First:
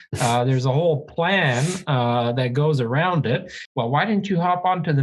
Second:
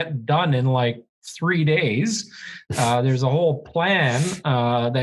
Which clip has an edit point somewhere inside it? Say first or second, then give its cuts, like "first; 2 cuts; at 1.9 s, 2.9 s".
first; 1 cut; at 3.6 s